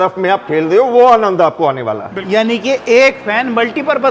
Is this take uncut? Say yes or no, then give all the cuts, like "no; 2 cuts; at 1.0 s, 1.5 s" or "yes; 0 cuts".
no; 1 cut; at 2.1 s